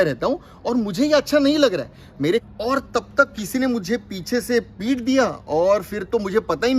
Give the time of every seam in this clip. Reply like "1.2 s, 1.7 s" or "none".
2.4 s